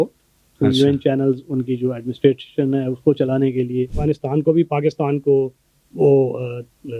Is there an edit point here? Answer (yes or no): yes